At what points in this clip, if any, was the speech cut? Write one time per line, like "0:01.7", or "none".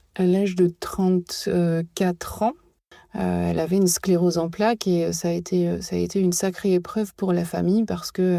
none